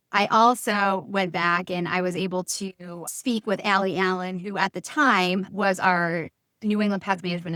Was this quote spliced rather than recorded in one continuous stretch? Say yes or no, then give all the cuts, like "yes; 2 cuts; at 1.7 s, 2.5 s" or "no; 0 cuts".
no; 0 cuts